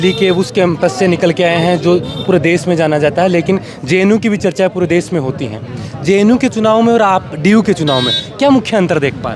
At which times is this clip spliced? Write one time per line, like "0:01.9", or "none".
none